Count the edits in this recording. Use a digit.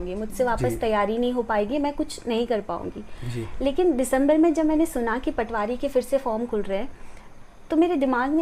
0